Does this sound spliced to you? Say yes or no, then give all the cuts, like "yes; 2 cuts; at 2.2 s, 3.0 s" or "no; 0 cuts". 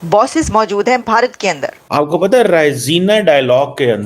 yes; 1 cut; at 1.7 s